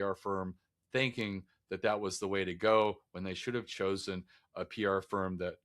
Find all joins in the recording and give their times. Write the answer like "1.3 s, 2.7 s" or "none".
none